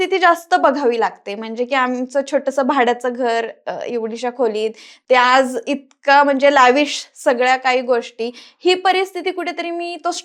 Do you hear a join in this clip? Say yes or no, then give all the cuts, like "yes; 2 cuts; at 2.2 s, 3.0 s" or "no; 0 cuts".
no; 0 cuts